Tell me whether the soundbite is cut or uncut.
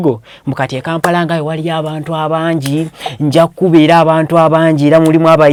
uncut